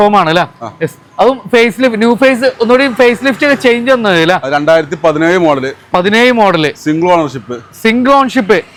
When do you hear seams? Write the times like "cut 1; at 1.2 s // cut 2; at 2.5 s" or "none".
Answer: none